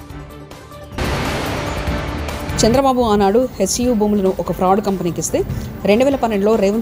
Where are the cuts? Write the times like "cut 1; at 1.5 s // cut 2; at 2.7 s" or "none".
cut 1; at 0.9 s // cut 2; at 2.5 s